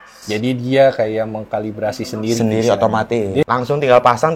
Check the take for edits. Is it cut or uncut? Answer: cut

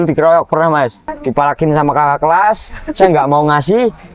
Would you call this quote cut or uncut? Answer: cut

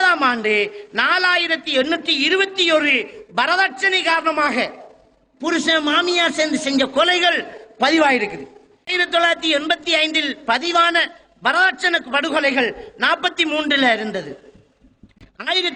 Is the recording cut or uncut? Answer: cut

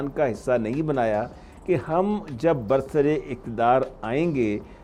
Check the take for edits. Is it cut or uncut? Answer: uncut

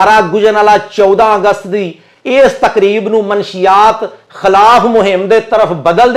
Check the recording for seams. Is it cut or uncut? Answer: uncut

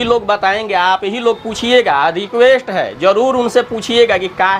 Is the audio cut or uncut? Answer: uncut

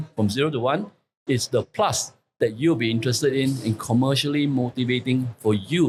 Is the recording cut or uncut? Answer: uncut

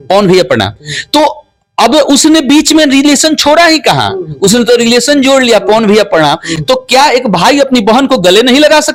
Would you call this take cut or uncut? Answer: uncut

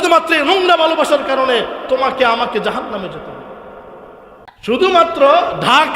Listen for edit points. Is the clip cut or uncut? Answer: cut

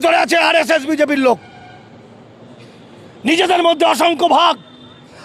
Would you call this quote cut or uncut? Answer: uncut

